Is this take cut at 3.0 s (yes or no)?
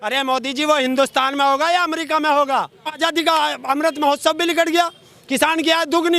yes